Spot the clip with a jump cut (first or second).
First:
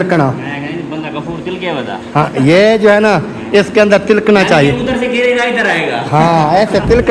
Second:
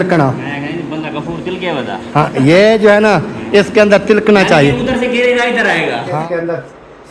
second